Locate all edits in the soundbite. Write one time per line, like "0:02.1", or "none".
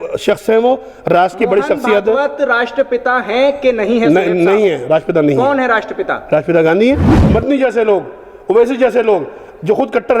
0:07.1